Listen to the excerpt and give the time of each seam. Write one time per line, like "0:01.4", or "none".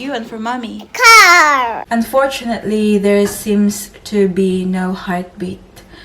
0:01.8